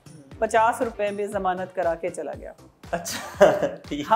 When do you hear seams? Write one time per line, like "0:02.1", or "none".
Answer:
none